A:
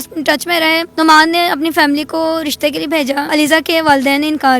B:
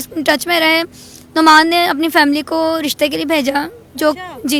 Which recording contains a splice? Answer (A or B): A